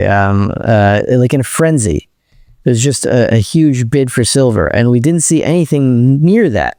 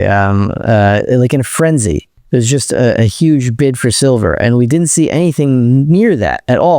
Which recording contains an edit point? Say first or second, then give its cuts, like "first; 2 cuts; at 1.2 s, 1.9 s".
second; 1 cut; at 2.1 s